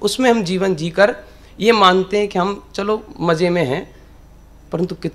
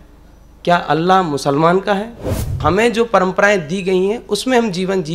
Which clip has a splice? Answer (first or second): second